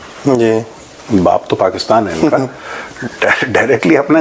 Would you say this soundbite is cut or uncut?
uncut